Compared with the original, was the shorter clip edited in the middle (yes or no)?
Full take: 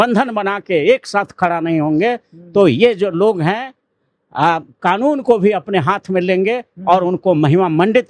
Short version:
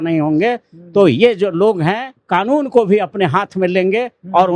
yes